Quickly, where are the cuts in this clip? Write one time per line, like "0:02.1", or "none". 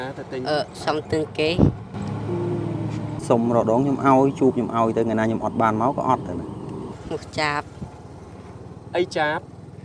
0:03.1
0:06.8

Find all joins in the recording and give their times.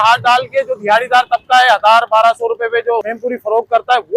0:03.1

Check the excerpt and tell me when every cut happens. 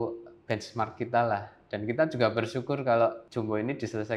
0:03.2

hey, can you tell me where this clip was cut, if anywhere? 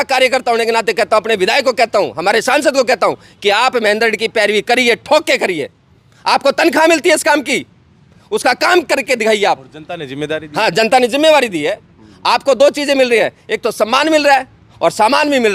none

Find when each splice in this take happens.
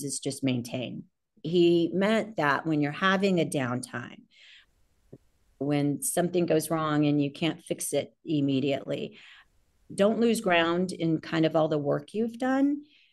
0:01.3

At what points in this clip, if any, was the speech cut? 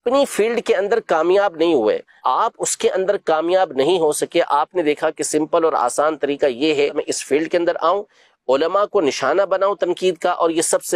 0:02.1
0:07.0

